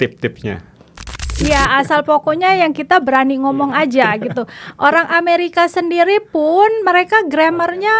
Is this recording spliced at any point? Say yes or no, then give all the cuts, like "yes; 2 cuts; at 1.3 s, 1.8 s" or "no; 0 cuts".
yes; 1 cut; at 0.9 s